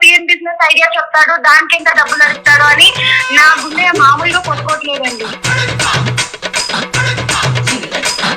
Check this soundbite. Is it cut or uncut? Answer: cut